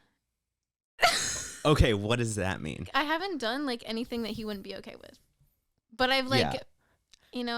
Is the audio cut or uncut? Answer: cut